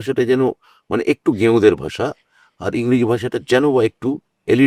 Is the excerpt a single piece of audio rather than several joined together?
yes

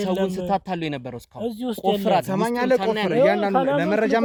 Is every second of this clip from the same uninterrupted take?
yes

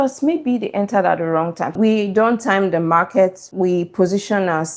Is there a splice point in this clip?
yes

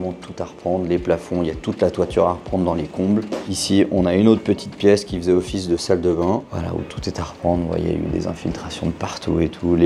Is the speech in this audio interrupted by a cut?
no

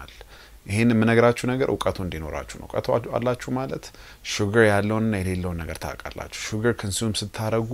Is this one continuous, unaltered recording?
yes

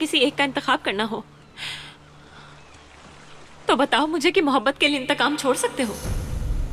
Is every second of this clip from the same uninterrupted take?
yes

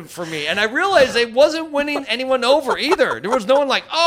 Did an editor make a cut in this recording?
yes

